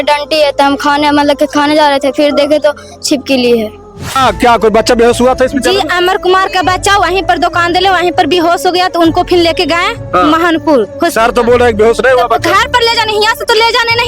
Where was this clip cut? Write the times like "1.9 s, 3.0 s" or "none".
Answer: 4.2 s